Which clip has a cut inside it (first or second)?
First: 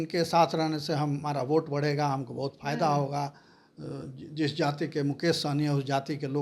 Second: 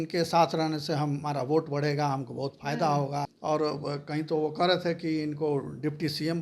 second